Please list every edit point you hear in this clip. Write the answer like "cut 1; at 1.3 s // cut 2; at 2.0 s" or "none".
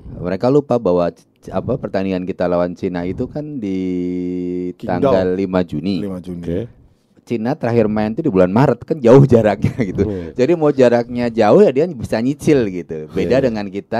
none